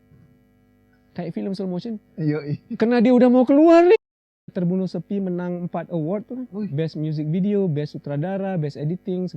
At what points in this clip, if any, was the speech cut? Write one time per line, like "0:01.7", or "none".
0:04.0